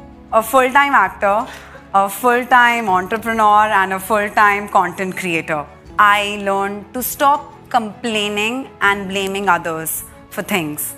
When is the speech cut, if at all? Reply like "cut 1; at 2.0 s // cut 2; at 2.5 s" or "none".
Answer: cut 1; at 5.8 s

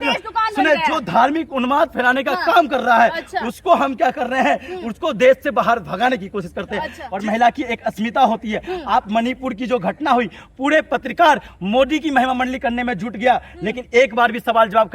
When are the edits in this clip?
cut 1; at 7.0 s

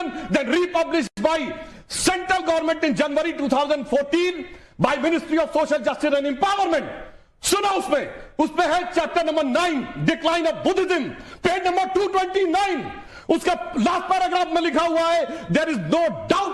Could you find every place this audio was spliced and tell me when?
none

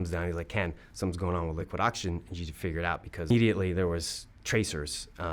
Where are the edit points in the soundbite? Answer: cut 1; at 1.6 s // cut 2; at 3.3 s

